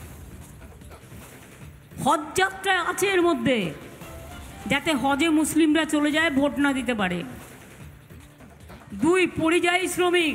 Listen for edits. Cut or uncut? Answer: cut